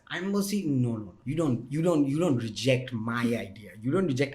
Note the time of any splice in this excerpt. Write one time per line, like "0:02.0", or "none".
0:01.1